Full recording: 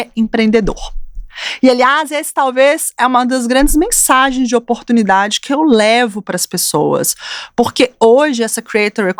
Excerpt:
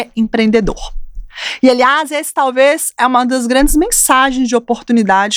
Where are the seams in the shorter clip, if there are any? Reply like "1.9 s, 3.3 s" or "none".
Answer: none